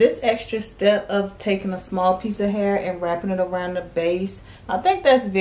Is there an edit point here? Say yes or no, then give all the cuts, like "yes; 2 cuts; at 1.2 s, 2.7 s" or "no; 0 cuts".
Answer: no; 0 cuts